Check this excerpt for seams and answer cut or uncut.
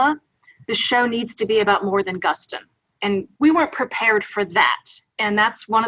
cut